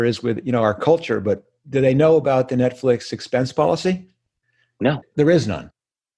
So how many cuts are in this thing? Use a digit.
2